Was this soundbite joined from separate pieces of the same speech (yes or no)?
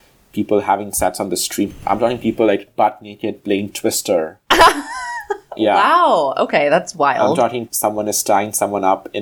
yes